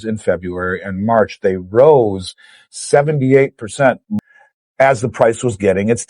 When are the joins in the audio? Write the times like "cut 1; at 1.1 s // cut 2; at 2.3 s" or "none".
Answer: cut 1; at 4.1 s